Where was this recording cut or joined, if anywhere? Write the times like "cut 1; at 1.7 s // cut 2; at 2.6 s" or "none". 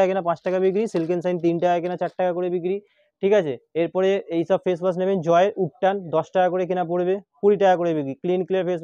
none